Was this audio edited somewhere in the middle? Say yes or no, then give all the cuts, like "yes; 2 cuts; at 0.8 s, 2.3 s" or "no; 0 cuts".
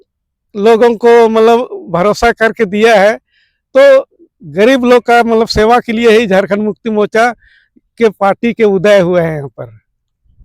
no; 0 cuts